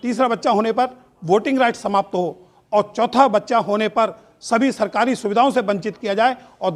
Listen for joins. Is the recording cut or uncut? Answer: uncut